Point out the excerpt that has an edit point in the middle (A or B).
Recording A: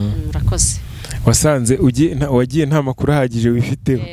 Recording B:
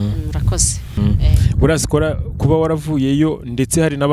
B